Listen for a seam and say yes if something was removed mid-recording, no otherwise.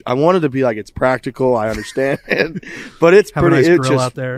no